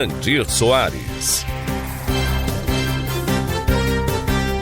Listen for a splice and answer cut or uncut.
cut